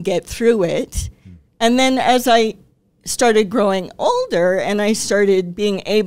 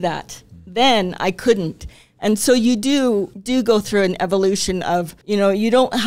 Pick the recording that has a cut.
second; 2 cuts; at 3.4 s, 5.2 s

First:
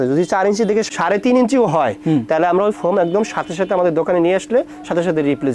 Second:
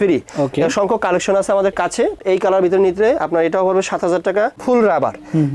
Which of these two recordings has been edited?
second; 2 cuts; at 2.2 s, 4.5 s

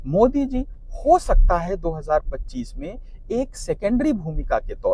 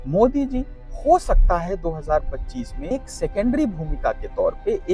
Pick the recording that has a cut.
second; 1 cut; at 2.9 s

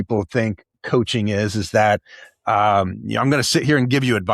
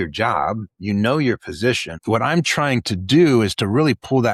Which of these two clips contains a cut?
second; 1 cut; at 1.9 s

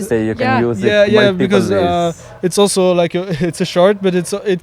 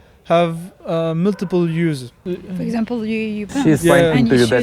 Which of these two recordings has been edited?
second; 1 cut; at 2.2 s

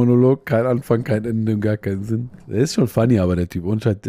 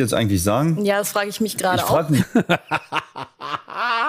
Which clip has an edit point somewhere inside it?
first; 1 cut; at 2.4 s

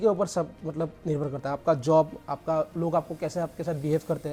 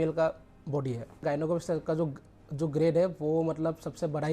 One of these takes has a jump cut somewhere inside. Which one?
second; 1 cut; at 1.2 s

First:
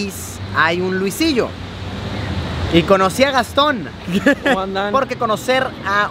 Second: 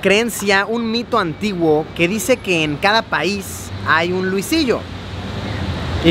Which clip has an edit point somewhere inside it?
first; 1 cut; at 4.9 s

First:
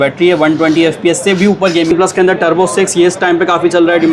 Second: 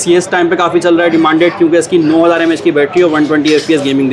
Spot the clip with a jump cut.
first; 1 cut; at 1.9 s

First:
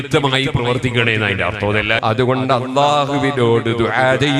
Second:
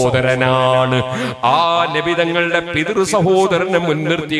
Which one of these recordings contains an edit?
first; 1 cut; at 2.0 s

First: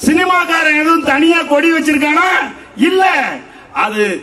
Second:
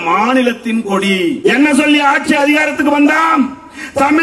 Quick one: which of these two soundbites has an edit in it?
second; 1 cut; at 1.4 s

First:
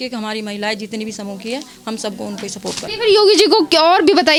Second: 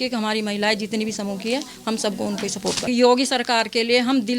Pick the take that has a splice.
second; 1 cut; at 2.9 s

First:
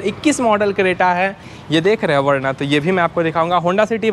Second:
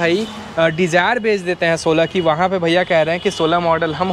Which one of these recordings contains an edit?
first; 1 cut; at 1.5 s

